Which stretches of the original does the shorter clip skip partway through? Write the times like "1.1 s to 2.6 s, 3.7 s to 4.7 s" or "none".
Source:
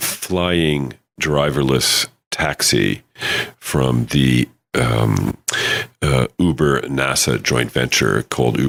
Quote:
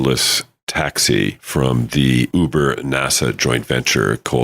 3.1 s to 3.6 s, 4.5 s to 6.3 s